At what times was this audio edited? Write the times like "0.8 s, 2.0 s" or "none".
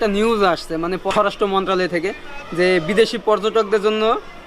1.1 s

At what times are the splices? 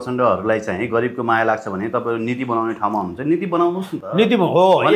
none

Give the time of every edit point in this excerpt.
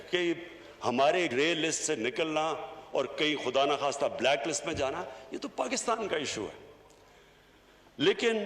1.3 s

